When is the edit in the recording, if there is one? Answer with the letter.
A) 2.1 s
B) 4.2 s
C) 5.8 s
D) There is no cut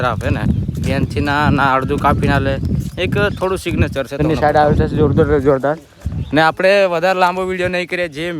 B